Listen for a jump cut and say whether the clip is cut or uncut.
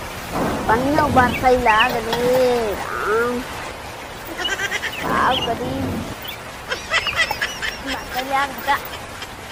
uncut